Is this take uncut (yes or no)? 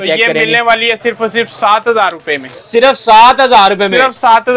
yes